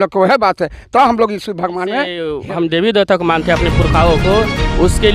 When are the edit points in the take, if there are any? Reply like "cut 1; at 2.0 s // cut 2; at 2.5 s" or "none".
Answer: cut 1; at 2.3 s